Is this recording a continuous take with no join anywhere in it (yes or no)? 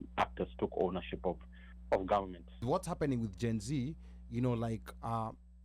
no